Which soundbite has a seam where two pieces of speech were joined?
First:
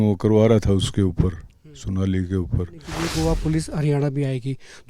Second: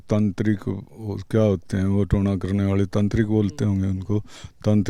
first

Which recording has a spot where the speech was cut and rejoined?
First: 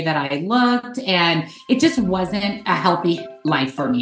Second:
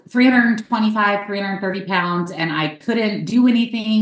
first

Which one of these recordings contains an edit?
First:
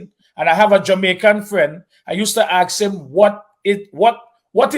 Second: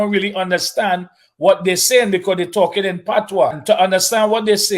second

